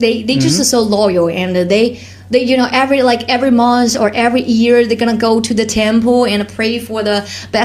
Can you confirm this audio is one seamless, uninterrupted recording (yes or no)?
yes